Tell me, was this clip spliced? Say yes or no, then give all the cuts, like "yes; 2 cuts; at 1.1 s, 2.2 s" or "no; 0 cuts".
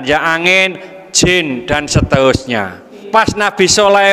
yes; 1 cut; at 3.0 s